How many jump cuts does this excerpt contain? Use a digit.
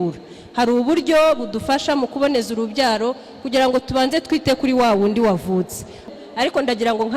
1